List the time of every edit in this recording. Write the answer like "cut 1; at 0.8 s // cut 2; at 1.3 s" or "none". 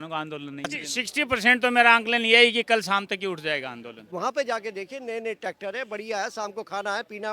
cut 1; at 1.1 s // cut 2; at 4.0 s